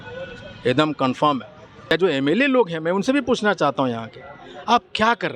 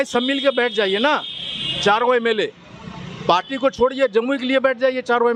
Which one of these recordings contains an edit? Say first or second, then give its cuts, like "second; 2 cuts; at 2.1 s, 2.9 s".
first; 1 cut; at 1.9 s